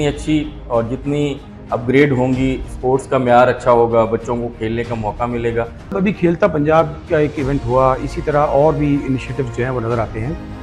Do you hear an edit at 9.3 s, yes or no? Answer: no